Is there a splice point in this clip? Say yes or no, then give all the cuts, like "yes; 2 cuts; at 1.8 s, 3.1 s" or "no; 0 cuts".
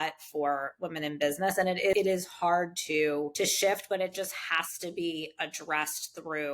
yes; 2 cuts; at 1.9 s, 3.3 s